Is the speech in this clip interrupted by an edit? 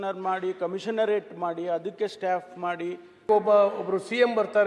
yes; 1 cut; at 3.1 s

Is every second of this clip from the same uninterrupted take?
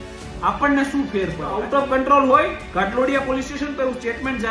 no; 1 cut; at 1.5 s

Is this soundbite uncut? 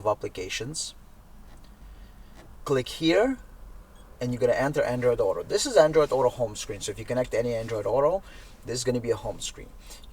no; 1 cut; at 2.5 s

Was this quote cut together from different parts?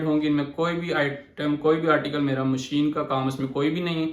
no; 0 cuts

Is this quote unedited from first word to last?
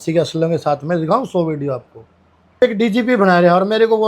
no; 1 cut; at 2.6 s

